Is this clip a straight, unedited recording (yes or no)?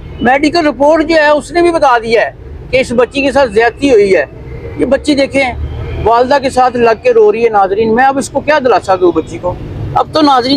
yes